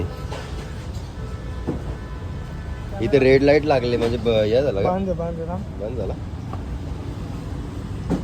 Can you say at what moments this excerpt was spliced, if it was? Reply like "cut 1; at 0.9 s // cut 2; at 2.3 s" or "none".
none